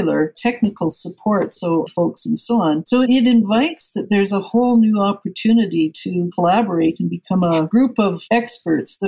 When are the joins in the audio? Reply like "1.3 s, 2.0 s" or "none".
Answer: 7.7 s